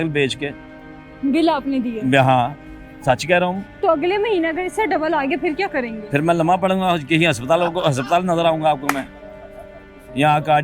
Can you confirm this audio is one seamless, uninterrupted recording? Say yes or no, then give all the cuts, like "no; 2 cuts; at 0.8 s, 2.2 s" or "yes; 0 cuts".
yes; 0 cuts